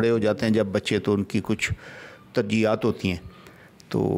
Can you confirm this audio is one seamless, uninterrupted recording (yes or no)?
yes